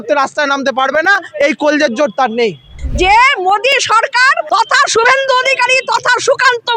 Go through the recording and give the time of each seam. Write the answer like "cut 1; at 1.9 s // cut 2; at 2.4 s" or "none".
cut 1; at 2.7 s // cut 2; at 4.4 s